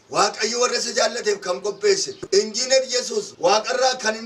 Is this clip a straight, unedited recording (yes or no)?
no